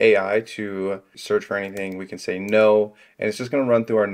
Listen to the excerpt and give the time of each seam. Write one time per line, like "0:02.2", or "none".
none